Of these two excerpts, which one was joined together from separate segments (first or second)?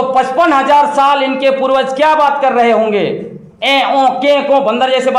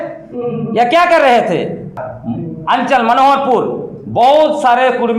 second